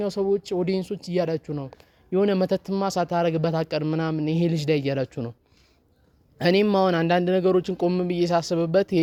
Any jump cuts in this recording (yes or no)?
no